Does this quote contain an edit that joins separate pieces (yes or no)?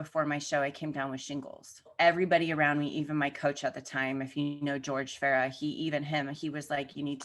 yes